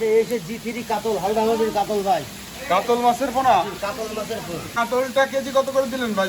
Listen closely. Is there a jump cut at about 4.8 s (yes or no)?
yes